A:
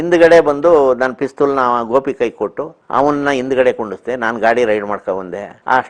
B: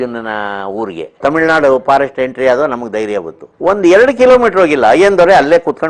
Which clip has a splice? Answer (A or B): B